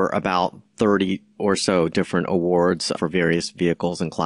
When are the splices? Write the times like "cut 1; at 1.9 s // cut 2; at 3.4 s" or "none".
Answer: cut 1; at 2.9 s